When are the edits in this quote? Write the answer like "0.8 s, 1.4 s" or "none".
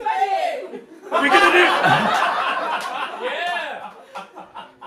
none

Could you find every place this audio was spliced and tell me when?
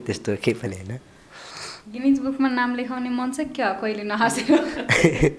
none

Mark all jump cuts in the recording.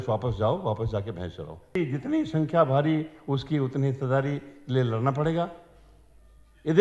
1.8 s

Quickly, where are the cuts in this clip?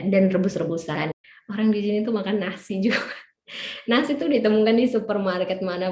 1.1 s

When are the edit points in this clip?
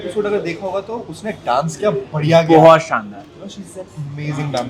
none

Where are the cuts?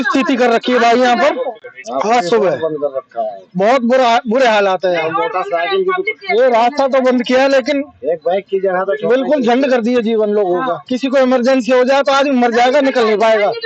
none

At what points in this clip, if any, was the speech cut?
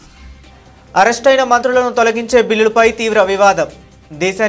0.9 s

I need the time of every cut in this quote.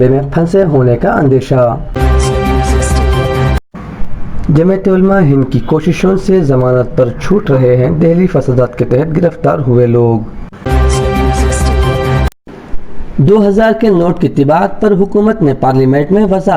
2.0 s, 3.6 s, 10.7 s, 12.3 s

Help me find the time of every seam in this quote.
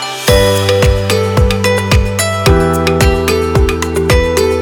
none

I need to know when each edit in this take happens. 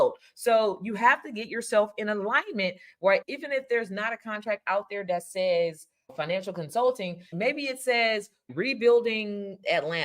8.5 s

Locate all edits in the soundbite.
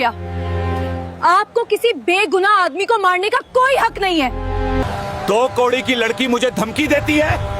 4.8 s

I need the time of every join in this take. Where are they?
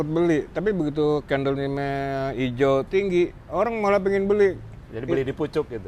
none

